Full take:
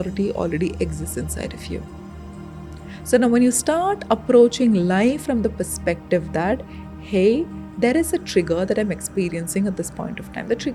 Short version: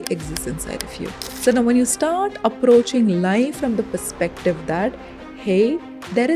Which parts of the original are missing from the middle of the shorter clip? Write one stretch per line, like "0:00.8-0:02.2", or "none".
0:02.0-0:02.9